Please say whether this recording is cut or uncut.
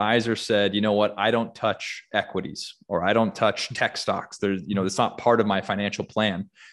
uncut